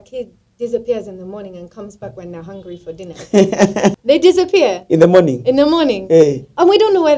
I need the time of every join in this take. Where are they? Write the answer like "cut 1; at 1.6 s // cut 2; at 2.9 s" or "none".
cut 1; at 4.0 s

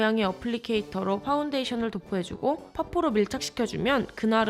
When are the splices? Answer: cut 1; at 2.4 s

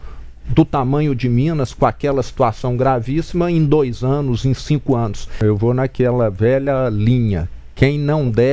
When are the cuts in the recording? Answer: cut 1; at 5.2 s

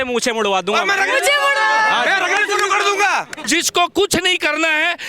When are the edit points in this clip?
cut 1; at 3.4 s

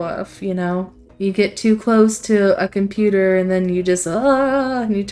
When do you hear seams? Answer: cut 1; at 1.0 s

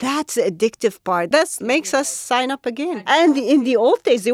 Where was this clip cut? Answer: cut 1; at 1.4 s // cut 2; at 3.1 s

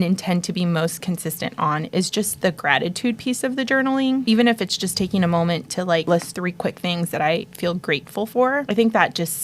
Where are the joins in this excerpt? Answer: cut 1; at 4.2 s // cut 2; at 6.2 s // cut 3; at 8.6 s

